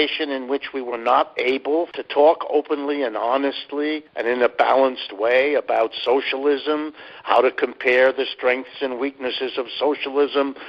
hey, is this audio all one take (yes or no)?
no